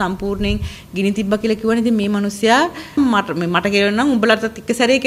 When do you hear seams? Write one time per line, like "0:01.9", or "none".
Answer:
0:03.0